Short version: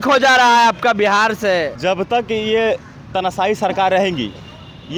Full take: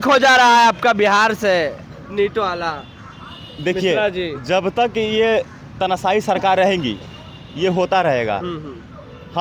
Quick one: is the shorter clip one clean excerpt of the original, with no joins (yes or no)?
no